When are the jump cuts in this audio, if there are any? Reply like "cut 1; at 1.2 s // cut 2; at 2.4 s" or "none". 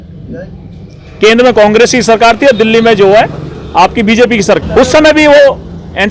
cut 1; at 4.6 s